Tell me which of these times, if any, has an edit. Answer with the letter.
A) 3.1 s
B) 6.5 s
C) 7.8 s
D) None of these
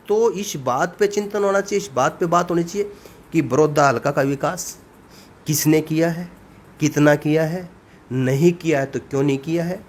D